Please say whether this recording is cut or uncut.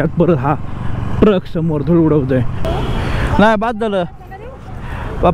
cut